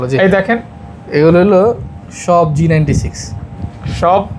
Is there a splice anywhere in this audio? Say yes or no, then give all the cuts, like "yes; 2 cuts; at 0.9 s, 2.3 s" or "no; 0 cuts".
no; 0 cuts